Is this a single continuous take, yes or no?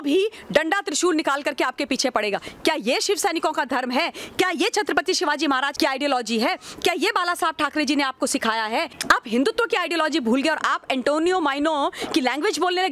no